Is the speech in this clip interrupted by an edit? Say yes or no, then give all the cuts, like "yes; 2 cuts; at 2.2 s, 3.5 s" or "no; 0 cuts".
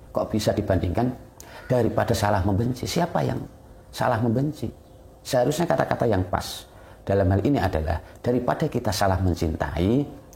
no; 0 cuts